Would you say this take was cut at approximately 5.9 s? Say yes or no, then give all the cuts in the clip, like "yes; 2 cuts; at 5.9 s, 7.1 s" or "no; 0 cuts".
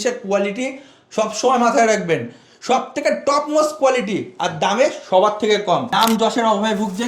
yes; 1 cut; at 5.9 s